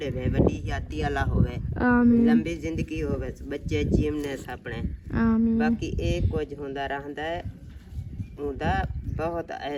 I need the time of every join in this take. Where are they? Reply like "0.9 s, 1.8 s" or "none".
none